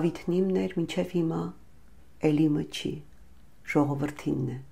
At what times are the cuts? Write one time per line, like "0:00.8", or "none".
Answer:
none